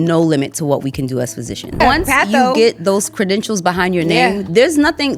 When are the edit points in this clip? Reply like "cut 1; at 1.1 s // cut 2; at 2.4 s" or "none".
cut 1; at 1.8 s